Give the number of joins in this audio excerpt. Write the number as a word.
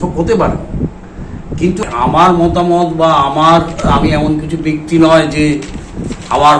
one